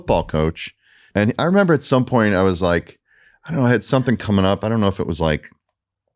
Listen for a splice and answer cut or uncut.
cut